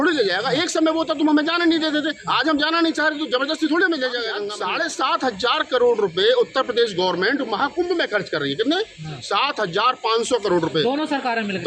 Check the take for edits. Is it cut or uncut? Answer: cut